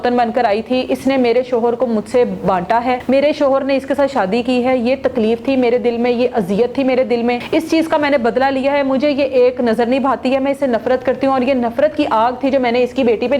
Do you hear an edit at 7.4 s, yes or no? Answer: yes